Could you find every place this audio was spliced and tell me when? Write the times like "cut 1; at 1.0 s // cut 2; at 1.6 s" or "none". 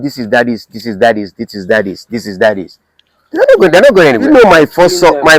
cut 1; at 4.2 s